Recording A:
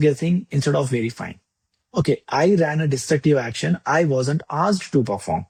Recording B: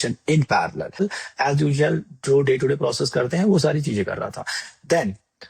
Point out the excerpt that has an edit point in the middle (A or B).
B